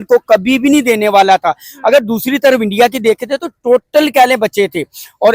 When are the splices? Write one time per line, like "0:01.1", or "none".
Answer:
none